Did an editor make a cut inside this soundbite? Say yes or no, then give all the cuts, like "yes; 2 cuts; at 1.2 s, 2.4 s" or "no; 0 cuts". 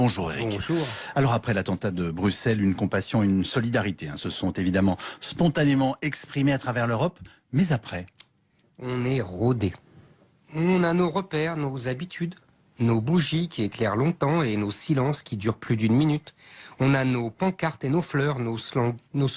no; 0 cuts